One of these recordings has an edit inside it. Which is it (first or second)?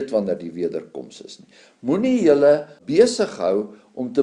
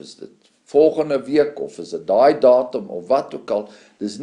first